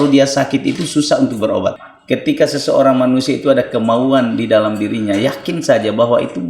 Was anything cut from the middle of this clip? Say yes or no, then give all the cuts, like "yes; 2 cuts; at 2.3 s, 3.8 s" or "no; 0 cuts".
yes; 1 cut; at 1.9 s